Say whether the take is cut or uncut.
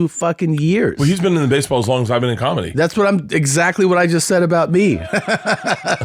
uncut